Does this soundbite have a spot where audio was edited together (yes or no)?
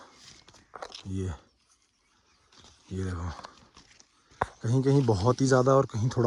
no